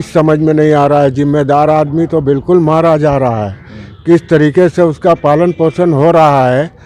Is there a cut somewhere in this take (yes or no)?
no